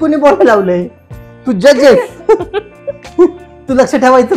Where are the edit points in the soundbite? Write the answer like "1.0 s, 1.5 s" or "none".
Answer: none